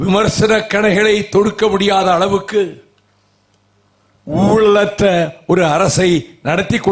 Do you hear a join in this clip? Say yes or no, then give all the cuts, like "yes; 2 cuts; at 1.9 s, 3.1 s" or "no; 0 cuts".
no; 0 cuts